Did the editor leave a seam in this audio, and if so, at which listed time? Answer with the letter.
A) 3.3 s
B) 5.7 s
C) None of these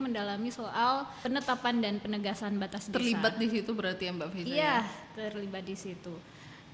C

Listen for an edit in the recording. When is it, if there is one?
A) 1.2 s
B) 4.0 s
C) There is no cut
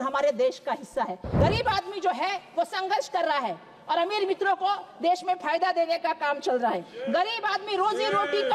A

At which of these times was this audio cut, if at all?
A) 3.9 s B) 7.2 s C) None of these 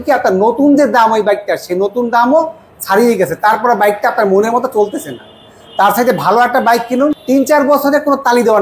B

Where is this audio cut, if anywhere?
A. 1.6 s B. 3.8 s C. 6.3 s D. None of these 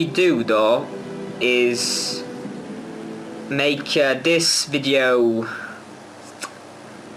A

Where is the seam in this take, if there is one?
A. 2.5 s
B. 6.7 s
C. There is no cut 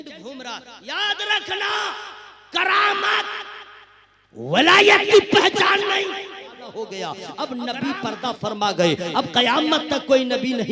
B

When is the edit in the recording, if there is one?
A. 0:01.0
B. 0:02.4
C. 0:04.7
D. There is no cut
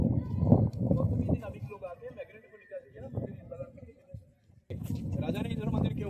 C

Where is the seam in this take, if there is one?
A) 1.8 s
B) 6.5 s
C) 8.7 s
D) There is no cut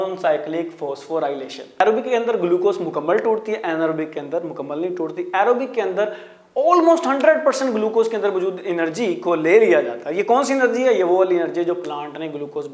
A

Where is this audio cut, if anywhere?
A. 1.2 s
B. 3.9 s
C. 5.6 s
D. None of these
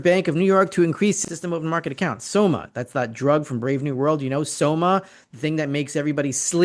A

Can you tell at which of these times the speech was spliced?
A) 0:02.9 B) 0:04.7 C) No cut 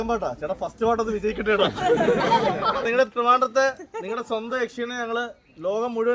A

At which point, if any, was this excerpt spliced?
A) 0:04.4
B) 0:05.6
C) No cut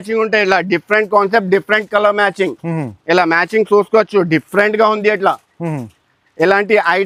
C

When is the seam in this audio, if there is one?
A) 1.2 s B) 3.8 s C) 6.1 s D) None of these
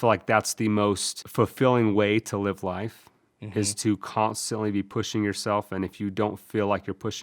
A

